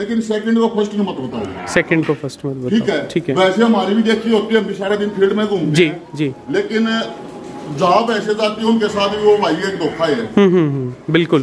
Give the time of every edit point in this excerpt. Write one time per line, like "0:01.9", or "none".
none